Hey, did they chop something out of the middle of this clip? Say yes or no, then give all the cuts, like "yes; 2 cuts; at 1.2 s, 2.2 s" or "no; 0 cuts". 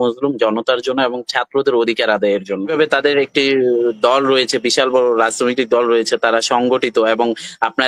yes; 1 cut; at 2.7 s